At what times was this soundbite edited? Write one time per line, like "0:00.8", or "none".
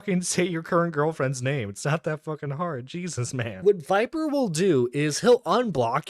0:03.5